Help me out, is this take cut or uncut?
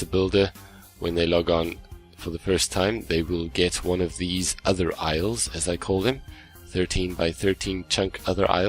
cut